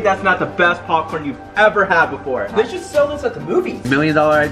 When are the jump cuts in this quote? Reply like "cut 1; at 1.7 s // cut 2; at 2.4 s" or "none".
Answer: cut 1; at 2.5 s